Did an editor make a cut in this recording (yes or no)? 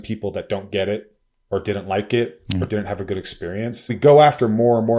yes